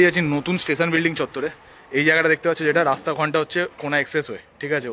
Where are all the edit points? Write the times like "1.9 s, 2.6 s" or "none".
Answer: none